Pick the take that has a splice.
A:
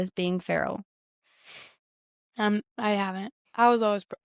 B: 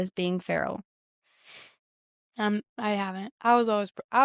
B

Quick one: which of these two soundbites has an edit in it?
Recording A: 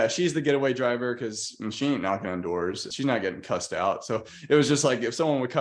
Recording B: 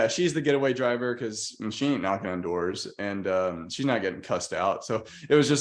A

